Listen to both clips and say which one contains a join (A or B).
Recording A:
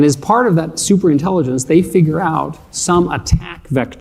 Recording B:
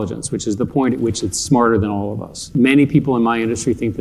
B